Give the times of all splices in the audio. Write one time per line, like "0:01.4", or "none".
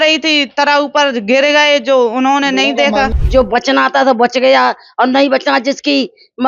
0:03.1